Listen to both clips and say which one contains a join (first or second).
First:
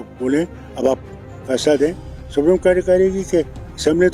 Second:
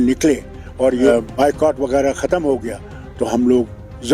second